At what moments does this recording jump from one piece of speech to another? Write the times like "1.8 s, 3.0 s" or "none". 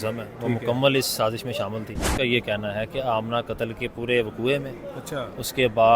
1.9 s